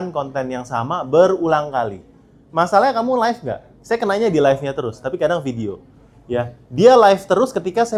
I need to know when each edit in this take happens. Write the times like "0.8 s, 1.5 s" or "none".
none